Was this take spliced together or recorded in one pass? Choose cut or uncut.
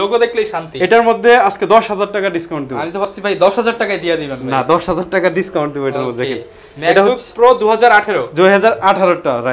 uncut